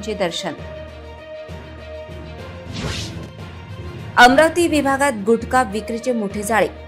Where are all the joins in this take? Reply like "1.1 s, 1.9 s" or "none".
3.3 s